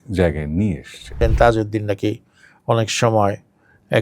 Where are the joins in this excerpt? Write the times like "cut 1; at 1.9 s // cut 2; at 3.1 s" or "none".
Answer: cut 1; at 1.2 s

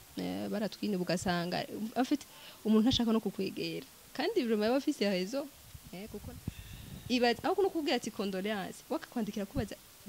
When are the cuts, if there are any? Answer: cut 1; at 6.0 s

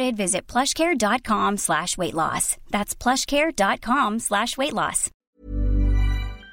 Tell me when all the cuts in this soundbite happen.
cut 1; at 5.2 s

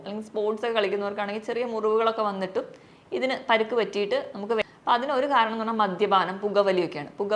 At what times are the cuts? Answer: cut 1; at 4.6 s

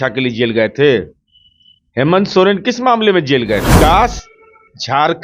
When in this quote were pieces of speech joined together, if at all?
cut 1; at 3.7 s

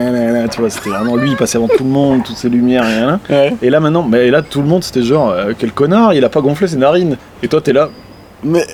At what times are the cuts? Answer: none

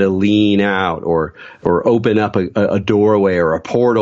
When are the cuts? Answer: cut 1; at 1.6 s

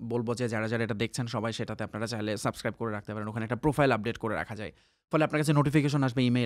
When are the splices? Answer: none

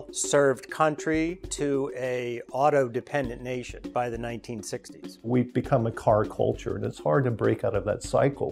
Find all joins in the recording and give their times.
none

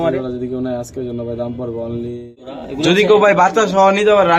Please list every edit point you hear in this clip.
cut 1; at 2.4 s

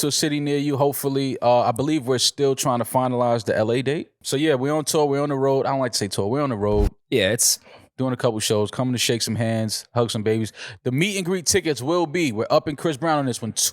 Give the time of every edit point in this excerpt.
cut 1; at 4.2 s

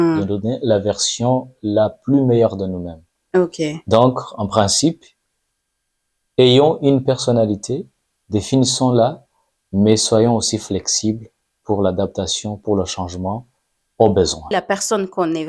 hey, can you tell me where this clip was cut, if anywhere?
cut 1; at 14.5 s

